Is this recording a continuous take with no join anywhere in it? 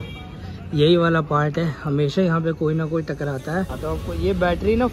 no; 1 cut; at 3.7 s

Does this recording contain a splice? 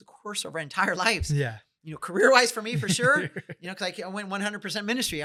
no; 0 cuts

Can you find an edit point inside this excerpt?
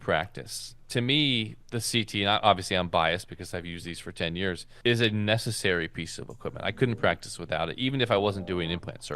yes; 2 cuts; at 1.6 s, 4.7 s

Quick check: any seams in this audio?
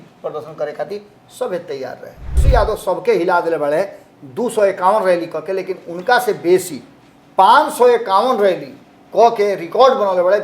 yes; 1 cut; at 2.4 s

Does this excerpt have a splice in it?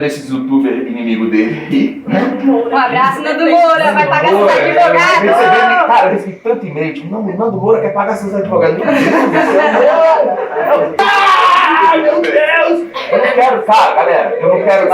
yes; 1 cut; at 10.9 s

